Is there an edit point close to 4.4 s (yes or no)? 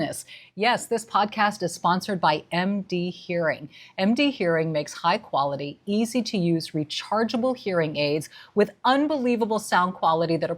no